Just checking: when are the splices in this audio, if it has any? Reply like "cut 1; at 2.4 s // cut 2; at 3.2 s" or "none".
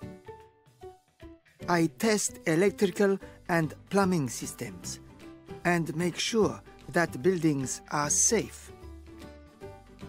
none